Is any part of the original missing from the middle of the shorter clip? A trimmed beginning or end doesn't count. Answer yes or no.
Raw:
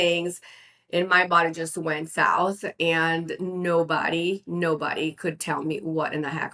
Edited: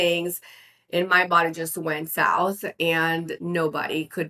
yes